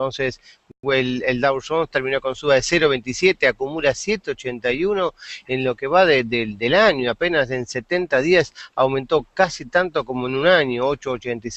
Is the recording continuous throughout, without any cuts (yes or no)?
no